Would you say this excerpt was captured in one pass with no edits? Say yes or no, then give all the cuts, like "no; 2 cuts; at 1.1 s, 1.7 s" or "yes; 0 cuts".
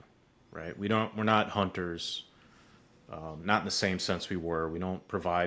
yes; 0 cuts